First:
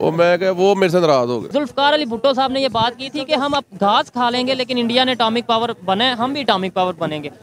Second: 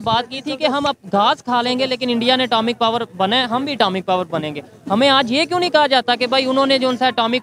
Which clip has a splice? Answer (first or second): first